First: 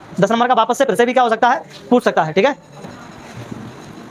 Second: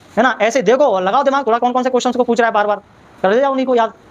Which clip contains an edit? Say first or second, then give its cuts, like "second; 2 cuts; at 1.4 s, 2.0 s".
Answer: first; 1 cut; at 2.8 s